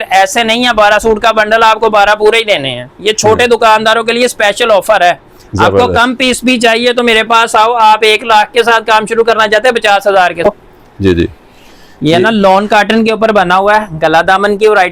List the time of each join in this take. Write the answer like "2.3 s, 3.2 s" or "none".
10.4 s